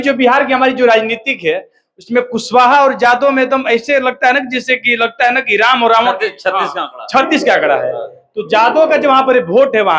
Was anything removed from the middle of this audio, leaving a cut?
no; 0 cuts

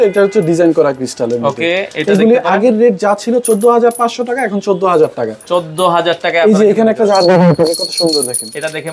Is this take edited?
no; 0 cuts

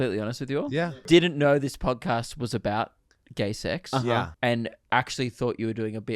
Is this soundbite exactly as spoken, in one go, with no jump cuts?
no; 2 cuts; at 1.0 s, 4.3 s

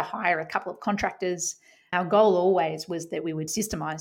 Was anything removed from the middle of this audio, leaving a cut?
yes; 1 cut; at 1.9 s

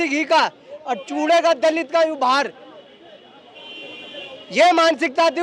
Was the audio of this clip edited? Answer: no; 0 cuts

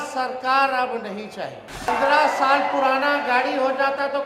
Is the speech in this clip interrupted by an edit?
yes; 1 cut; at 1.9 s

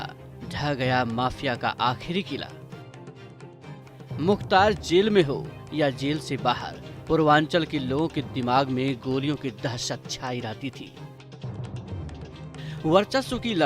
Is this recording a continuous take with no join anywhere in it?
no; 4 cuts; at 2.5 s, 4.2 s, 10.8 s, 12.8 s

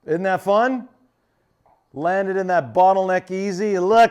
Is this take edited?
no; 0 cuts

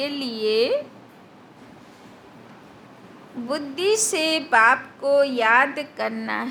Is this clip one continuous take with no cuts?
yes; 0 cuts

